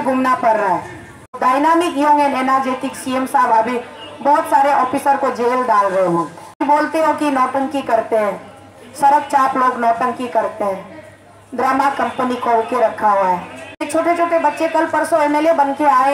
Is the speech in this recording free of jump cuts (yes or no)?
no